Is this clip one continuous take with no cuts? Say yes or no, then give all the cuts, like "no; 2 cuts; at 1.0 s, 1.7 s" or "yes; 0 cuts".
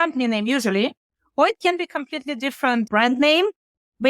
no; 1 cut; at 2.9 s